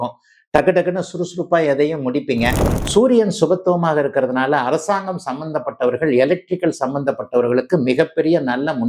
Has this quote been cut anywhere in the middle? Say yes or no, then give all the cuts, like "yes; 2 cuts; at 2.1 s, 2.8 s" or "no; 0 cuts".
yes; 1 cut; at 2.7 s